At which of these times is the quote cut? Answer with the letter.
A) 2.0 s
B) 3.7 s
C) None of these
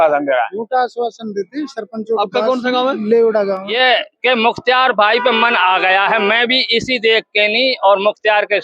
B